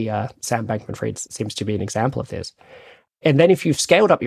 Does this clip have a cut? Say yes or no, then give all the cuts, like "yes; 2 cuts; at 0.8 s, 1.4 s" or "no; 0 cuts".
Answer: yes; 1 cut; at 1.3 s